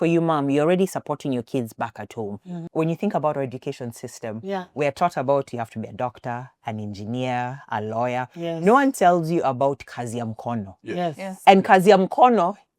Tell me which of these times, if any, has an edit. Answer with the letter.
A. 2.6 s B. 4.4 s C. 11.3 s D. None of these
A